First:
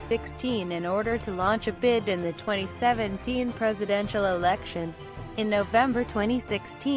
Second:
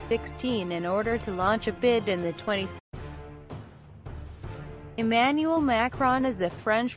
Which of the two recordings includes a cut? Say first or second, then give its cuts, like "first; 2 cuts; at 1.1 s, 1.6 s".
first; 1 cut; at 2.8 s